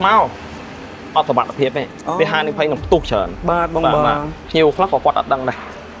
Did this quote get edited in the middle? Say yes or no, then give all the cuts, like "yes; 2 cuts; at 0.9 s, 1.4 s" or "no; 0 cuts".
yes; 1 cut; at 4.3 s